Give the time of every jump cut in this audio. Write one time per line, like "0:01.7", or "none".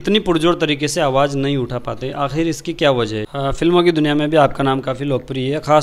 0:03.2